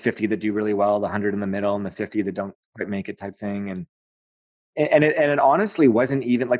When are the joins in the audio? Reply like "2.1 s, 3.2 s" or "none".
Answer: none